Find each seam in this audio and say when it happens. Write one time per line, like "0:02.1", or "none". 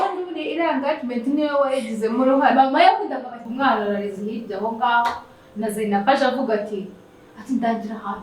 0:03.4